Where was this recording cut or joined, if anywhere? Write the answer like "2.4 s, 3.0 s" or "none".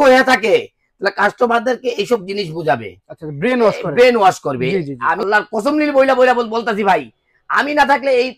5.2 s